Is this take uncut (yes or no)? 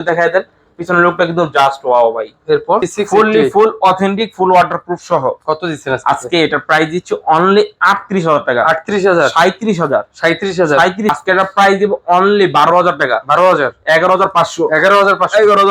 no